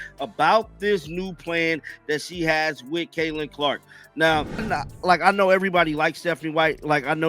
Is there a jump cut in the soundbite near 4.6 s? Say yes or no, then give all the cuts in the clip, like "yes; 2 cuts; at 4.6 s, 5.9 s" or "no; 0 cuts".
yes; 1 cut; at 4.6 s